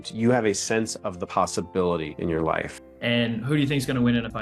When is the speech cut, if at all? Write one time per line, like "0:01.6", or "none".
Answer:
0:02.8

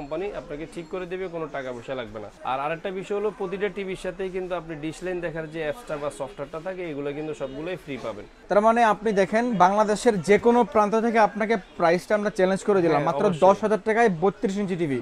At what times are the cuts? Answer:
0:02.3
0:08.3

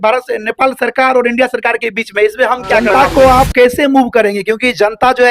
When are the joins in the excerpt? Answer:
0:02.8

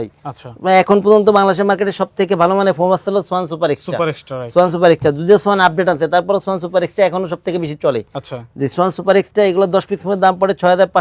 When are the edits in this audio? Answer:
none

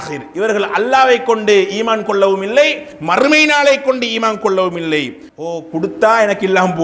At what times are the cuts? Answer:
0:05.3

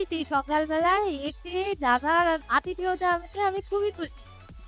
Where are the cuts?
0:02.4

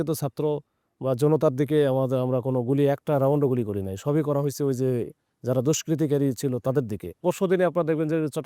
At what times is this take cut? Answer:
0:07.2

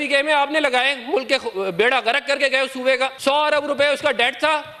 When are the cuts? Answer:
0:03.2

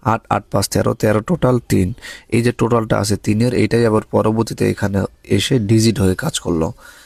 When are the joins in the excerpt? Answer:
none

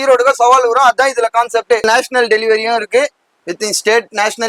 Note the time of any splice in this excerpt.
0:01.8

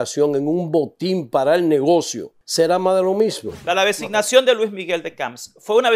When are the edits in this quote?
0:02.4
0:03.6

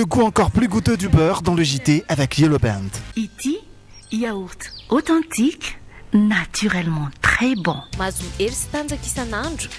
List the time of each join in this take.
0:03.1

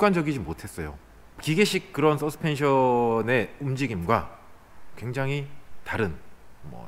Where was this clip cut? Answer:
0:01.4

